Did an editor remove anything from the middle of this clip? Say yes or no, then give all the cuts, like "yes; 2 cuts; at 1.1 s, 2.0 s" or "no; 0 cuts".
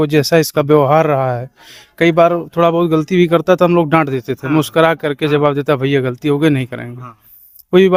no; 0 cuts